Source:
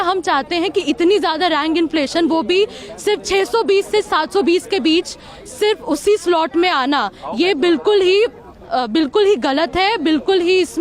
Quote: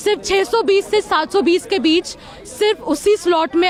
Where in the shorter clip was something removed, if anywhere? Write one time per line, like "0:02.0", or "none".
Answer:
none